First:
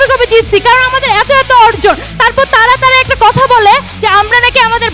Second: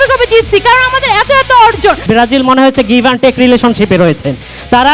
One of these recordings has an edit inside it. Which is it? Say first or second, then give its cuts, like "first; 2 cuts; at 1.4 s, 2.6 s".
second; 1 cut; at 2.0 s